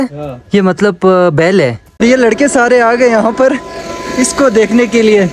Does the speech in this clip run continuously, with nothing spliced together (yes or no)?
no